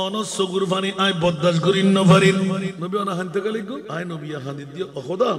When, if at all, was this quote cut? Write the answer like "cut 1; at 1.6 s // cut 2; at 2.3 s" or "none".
cut 1; at 2.7 s // cut 2; at 3.9 s